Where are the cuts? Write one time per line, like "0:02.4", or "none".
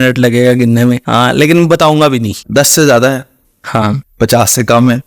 0:01.0
0:02.4
0:04.1